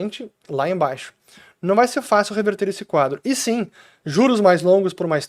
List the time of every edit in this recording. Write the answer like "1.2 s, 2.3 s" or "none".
none